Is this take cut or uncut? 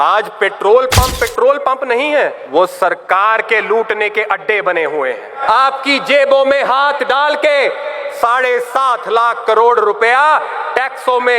cut